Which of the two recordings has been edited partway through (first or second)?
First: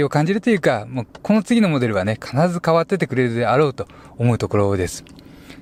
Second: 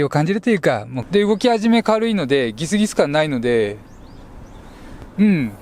second